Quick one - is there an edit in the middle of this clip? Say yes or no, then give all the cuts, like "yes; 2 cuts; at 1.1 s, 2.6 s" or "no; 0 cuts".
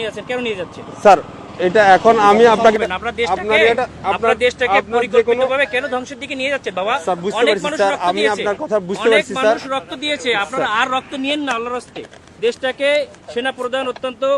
yes; 1 cut; at 2.7 s